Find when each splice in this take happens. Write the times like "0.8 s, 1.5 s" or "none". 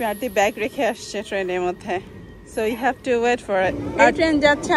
3.8 s